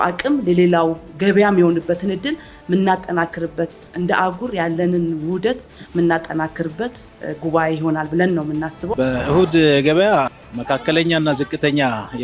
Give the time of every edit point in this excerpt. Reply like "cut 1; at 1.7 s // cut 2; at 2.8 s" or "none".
cut 1; at 8.8 s